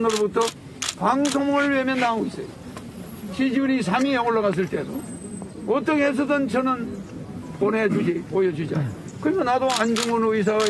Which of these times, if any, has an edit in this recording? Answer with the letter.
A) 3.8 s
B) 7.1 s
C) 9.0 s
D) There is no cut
C